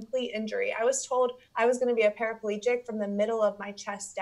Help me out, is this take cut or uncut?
cut